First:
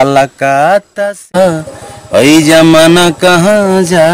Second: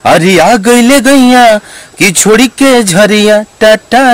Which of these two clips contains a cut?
first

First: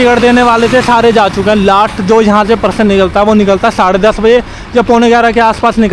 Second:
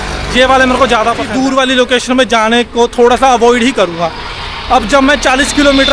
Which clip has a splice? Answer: second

